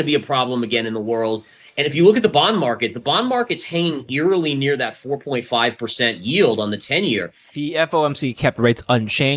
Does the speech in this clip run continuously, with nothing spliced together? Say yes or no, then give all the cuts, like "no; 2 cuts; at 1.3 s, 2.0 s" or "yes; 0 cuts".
no; 1 cut; at 7.4 s